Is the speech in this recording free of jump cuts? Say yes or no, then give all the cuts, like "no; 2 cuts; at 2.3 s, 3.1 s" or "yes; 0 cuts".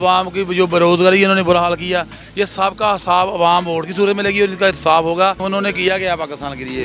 no; 1 cut; at 5.4 s